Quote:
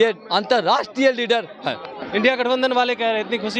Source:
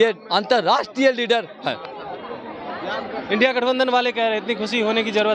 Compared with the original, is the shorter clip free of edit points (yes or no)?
no